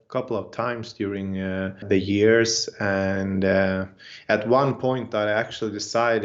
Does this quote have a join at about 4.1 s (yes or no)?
no